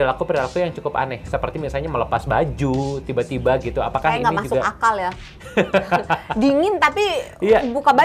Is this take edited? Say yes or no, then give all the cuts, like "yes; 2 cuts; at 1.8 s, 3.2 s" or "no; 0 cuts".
no; 0 cuts